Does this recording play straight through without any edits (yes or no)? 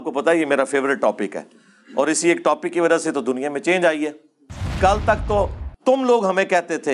no